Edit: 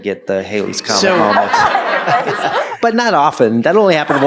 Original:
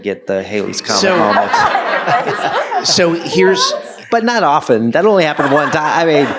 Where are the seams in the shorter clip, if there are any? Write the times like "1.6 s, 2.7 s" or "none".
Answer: 2.7 s